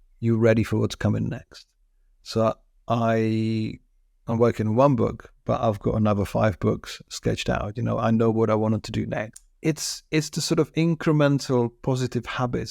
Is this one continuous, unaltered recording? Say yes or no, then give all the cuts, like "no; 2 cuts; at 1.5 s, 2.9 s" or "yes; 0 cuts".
no; 1 cut; at 9.4 s